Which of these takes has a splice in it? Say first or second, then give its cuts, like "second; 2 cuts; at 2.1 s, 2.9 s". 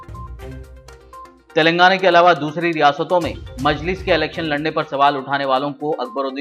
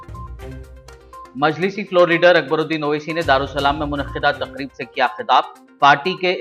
second; 1 cut; at 1.3 s